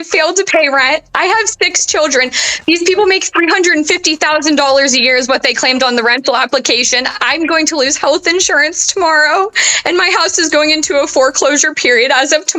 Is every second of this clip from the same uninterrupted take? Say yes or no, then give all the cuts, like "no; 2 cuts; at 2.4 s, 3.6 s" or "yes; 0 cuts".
yes; 0 cuts